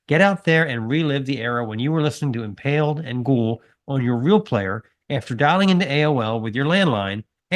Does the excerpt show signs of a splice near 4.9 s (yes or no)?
no